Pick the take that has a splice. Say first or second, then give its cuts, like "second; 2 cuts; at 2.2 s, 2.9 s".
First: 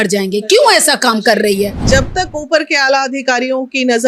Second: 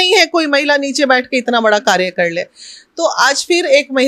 first; 1 cut; at 1.8 s